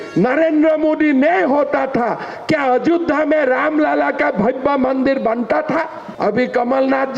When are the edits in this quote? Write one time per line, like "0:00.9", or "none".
0:06.0